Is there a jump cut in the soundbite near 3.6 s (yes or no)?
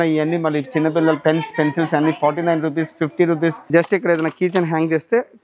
yes